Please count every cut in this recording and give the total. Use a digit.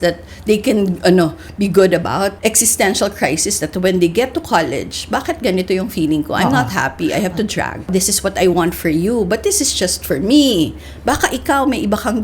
2